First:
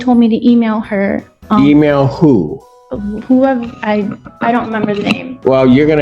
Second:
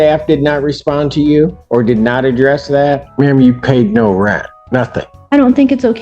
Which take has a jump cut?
second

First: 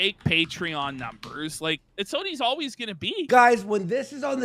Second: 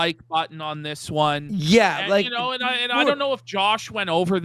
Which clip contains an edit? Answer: first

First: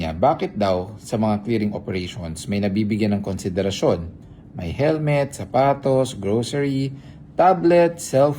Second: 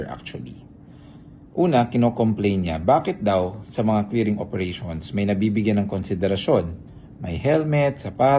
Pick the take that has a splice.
first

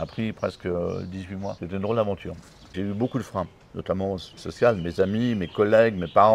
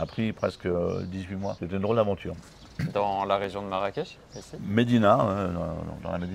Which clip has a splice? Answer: first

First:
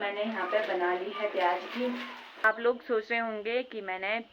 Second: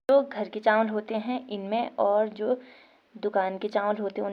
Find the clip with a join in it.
first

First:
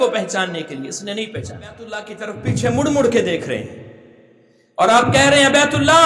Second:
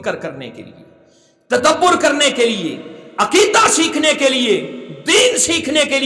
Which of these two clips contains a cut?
first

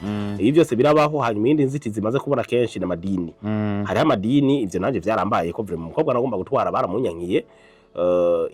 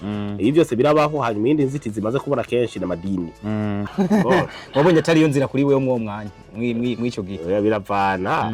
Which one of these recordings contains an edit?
second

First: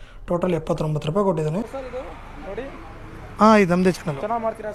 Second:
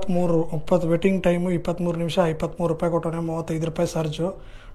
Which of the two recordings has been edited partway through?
first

